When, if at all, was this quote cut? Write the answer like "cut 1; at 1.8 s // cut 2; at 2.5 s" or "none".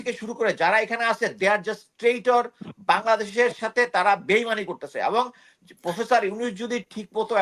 none